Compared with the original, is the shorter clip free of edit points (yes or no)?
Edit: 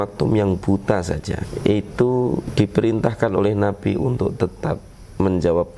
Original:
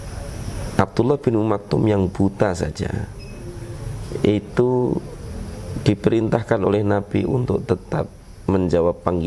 no